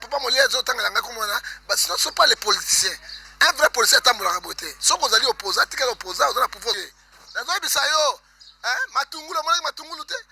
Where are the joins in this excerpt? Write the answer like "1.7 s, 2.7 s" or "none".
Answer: 6.7 s